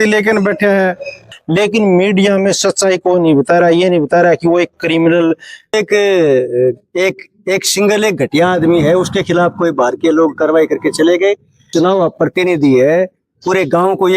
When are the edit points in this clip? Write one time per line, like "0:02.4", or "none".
0:01.3
0:05.7
0:11.7